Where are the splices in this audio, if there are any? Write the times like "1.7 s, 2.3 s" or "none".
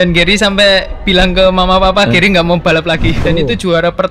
3.1 s